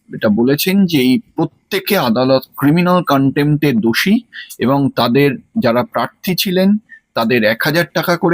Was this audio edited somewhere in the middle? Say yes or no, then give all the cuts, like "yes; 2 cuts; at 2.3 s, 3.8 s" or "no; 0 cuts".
no; 0 cuts